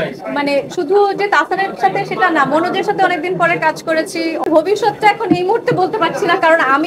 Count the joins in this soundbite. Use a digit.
1